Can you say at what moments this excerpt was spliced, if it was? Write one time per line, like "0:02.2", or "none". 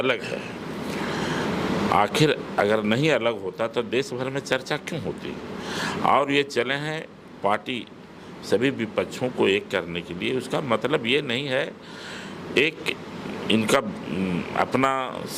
none